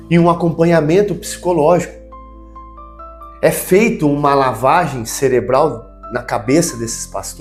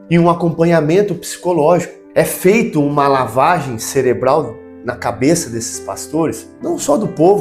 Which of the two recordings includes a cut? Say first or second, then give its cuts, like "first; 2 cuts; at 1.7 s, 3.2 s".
second; 2 cuts; at 2.0 s, 6.5 s